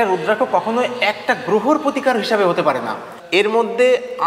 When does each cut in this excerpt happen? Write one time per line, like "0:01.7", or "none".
0:03.1